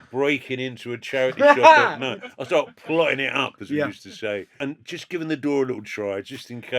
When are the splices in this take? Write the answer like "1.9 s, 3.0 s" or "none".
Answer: 4.7 s